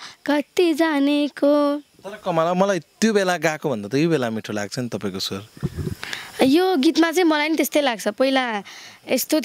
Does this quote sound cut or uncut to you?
uncut